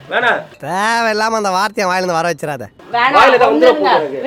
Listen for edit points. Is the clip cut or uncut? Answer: uncut